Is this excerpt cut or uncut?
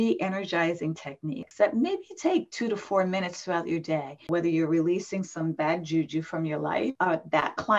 cut